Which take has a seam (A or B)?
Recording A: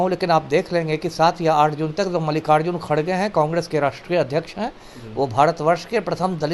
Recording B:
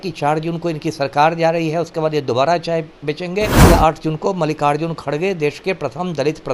B